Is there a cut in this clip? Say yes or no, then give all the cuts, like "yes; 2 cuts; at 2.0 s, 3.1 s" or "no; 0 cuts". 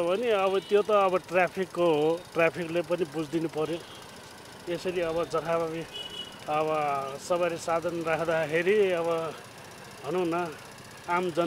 no; 0 cuts